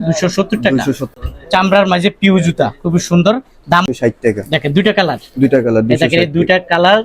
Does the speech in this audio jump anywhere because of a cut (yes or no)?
yes